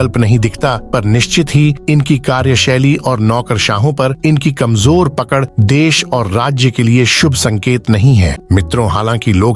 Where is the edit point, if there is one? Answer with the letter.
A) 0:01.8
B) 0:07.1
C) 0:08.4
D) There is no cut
C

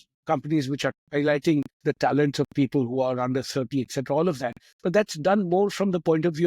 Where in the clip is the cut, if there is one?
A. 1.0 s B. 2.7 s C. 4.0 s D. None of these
A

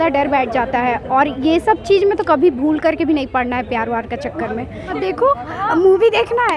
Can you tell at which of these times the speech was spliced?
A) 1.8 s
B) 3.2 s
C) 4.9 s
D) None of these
C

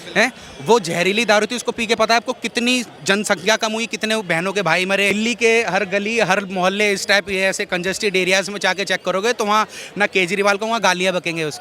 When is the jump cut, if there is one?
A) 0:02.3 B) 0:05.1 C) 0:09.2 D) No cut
B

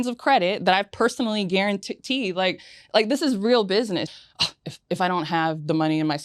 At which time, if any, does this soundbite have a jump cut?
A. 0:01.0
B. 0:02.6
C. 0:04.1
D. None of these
C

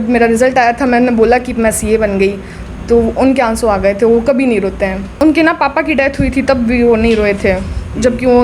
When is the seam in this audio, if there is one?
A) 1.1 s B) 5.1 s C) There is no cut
B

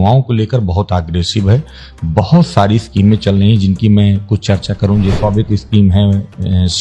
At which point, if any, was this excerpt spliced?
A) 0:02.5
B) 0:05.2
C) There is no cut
B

